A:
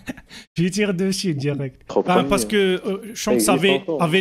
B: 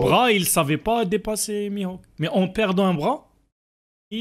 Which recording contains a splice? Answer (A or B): A